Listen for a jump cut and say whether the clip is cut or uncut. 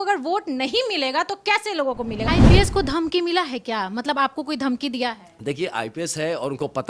cut